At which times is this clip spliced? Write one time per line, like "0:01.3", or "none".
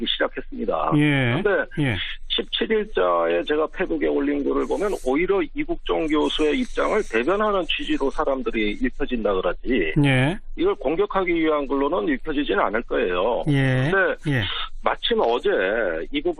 0:07.5